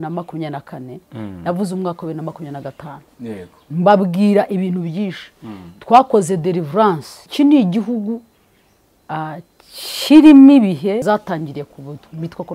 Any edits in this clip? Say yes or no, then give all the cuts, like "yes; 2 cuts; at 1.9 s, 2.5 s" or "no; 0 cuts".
yes; 2 cuts; at 7.1 s, 11.0 s